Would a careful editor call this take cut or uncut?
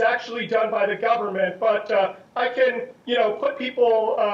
cut